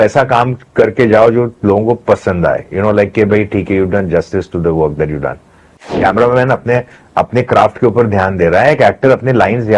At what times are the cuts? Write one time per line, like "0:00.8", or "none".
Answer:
0:06.0